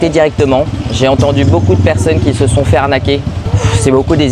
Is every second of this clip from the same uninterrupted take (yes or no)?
no